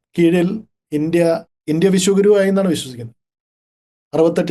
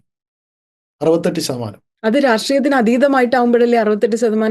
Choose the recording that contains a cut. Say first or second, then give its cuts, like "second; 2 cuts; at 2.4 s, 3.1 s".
first; 1 cut; at 1.5 s